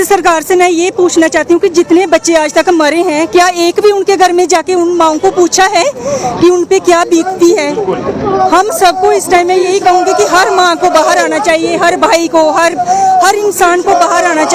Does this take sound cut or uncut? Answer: uncut